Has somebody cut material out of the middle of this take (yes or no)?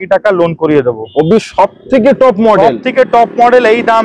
no